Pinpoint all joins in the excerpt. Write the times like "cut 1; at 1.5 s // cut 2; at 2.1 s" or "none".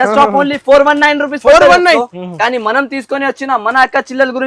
cut 1; at 2.1 s